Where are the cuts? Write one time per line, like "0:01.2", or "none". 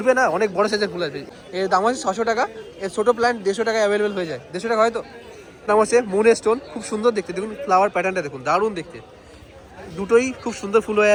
none